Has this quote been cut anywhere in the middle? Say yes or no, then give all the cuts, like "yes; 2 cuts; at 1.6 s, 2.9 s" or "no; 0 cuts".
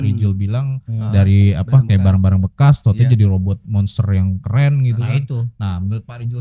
no; 0 cuts